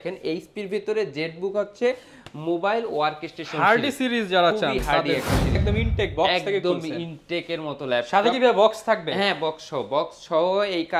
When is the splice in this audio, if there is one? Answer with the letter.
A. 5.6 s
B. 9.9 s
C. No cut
A